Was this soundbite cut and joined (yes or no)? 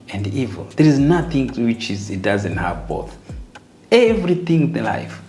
no